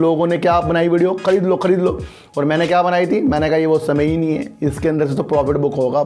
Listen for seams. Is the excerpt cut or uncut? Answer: uncut